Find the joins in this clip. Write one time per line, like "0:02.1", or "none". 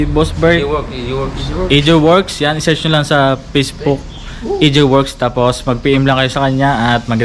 none